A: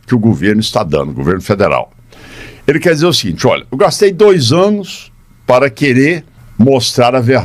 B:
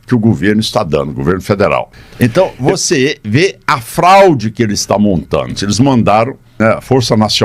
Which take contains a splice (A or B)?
B